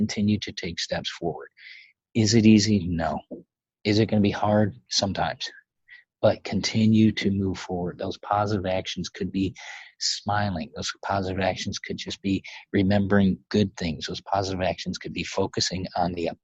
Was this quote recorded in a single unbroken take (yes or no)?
yes